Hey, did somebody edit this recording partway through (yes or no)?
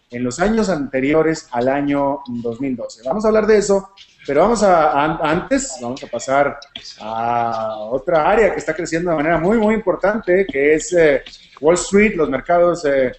yes